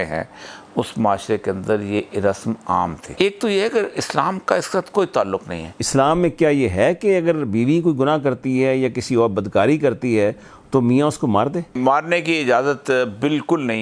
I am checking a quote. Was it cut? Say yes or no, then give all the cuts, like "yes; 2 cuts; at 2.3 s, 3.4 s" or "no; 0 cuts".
yes; 3 cuts; at 3.0 s, 5.7 s, 11.8 s